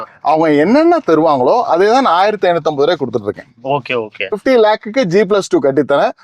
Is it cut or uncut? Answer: cut